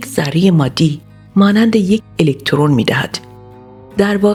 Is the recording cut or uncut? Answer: uncut